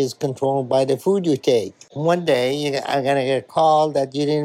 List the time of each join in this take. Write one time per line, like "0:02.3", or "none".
none